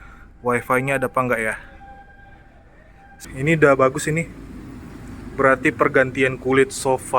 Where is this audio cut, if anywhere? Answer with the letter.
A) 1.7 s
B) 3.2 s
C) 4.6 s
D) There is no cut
B